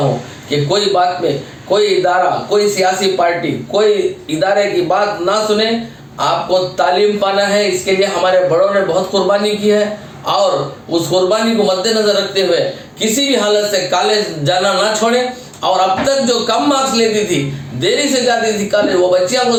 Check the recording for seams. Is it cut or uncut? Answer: uncut